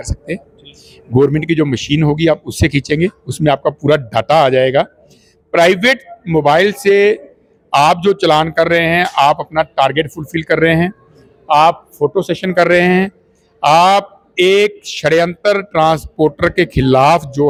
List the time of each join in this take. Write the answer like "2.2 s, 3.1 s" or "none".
none